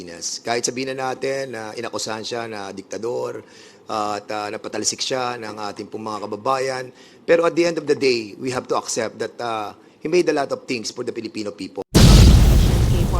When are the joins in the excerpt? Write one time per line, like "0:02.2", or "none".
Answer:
0:11.9